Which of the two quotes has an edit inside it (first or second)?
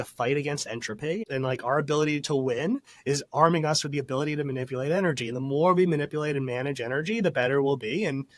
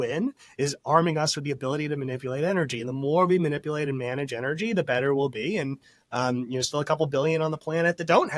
first